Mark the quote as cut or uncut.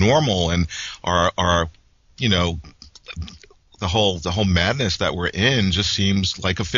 cut